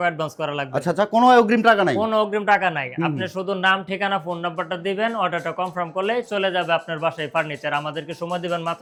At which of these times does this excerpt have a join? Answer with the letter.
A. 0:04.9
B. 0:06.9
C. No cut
C